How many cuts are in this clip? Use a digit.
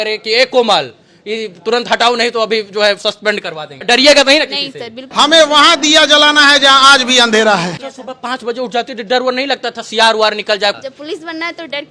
4